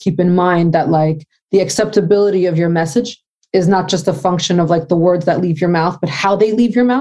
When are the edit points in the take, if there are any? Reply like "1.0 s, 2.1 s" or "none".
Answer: none